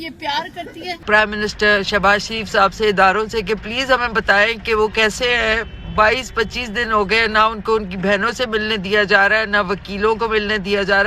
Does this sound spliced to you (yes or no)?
yes